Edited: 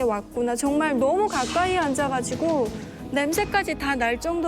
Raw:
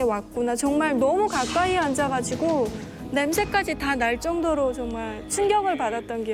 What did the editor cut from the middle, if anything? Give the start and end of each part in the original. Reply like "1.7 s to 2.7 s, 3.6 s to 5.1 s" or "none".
none